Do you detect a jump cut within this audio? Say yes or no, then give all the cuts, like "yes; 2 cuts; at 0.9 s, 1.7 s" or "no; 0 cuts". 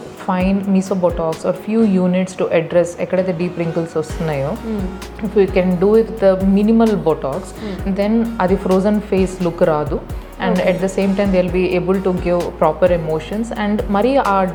no; 0 cuts